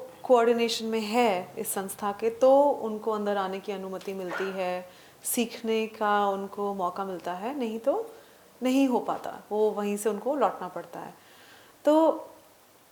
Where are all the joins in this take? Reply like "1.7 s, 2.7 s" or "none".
none